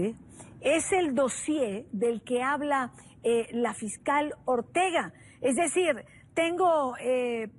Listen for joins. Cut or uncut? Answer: uncut